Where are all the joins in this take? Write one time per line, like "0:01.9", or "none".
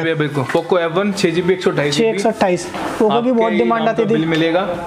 none